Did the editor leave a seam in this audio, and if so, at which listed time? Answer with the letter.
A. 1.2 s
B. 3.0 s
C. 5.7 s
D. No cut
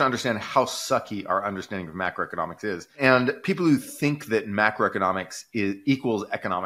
B